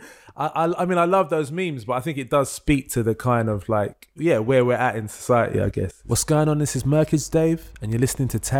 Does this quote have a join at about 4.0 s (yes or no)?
yes